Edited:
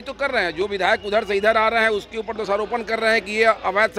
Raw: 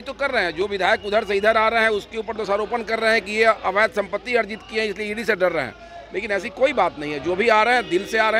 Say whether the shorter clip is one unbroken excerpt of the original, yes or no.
yes